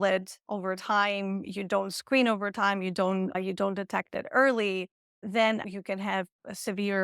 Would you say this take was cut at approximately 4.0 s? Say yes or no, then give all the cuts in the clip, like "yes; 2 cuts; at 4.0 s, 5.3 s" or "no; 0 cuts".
no; 1 cut; at 5.6 s